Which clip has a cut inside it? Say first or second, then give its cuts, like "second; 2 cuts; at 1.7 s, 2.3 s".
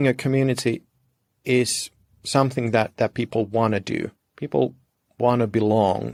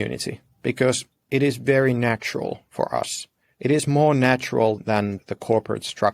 second; 1 cut; at 5.1 s